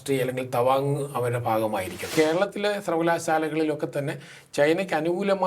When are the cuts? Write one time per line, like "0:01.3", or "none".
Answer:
0:02.1